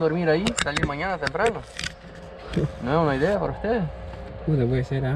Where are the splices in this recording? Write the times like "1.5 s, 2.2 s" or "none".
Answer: none